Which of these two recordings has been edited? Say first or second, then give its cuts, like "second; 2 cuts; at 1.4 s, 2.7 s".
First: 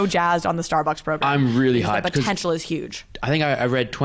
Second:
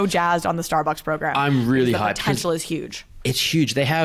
first; 2 cuts; at 1.2 s, 2.6 s